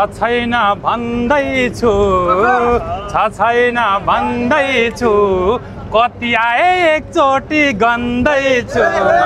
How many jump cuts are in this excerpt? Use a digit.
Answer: 0